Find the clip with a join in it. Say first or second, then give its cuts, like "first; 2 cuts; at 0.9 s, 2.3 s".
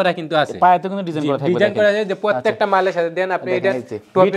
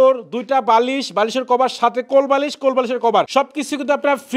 second; 1 cut; at 3.3 s